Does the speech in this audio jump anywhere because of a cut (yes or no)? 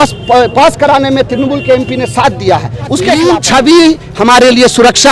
yes